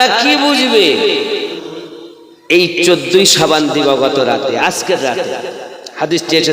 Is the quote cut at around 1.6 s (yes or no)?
yes